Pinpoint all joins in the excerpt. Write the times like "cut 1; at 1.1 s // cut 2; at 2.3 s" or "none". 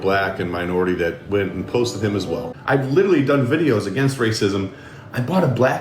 cut 1; at 2.5 s